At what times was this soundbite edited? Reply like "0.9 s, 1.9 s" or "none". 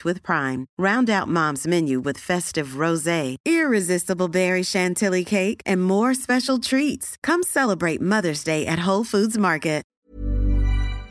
10.0 s